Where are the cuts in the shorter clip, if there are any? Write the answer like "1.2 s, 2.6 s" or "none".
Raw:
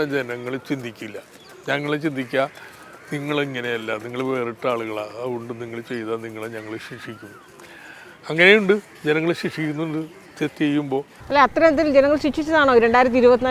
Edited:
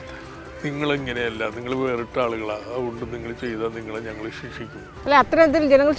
4.9 s